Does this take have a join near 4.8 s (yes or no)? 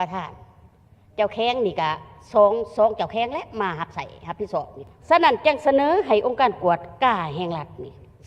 yes